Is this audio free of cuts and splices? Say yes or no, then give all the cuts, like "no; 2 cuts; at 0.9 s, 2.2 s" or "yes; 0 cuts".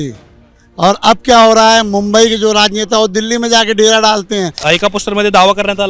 no; 1 cut; at 4.6 s